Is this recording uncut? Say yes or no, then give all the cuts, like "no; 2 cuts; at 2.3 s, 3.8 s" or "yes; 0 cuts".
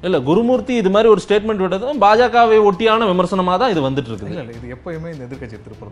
yes; 0 cuts